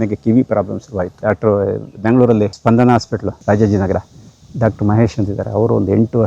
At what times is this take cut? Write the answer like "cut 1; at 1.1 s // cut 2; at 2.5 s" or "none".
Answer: cut 1; at 1.1 s // cut 2; at 2.5 s // cut 3; at 3.3 s